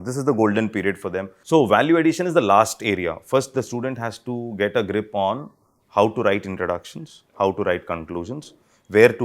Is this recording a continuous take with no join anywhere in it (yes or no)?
no